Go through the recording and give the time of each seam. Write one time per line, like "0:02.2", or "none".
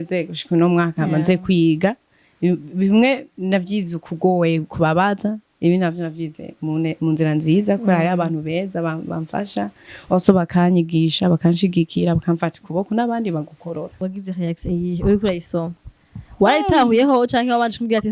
0:14.0

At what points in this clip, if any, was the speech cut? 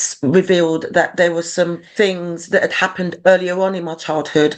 0:01.8

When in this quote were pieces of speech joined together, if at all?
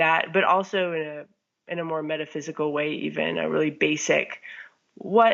none

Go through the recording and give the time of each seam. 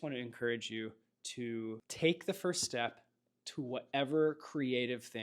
0:01.9

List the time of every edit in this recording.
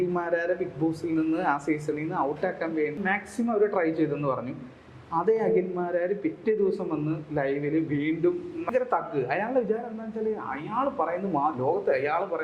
0:03.0
0:08.6

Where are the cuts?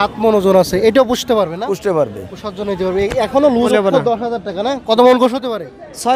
0:03.5

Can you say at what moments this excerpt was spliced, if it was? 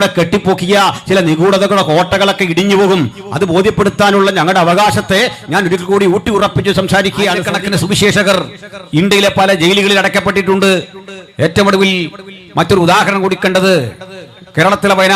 0:07.5

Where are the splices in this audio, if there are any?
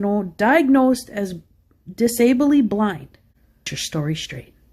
0:02.9

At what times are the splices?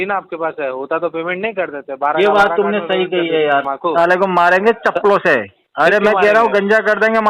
0:03.7
0:05.6

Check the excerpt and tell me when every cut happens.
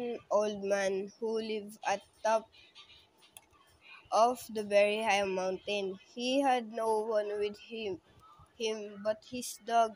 0:04.4
0:06.2

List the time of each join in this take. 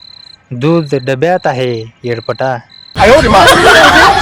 none

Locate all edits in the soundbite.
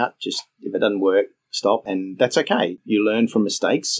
0:02.8

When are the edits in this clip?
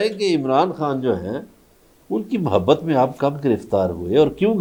none

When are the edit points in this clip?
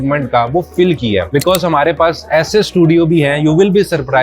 0:01.3

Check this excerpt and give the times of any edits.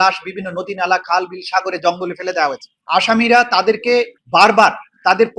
0:02.7
0:04.2

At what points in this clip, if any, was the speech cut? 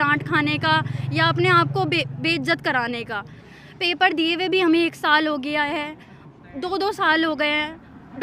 0:03.4

